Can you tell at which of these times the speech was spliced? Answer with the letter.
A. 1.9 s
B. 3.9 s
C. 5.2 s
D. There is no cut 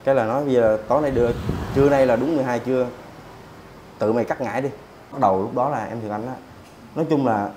C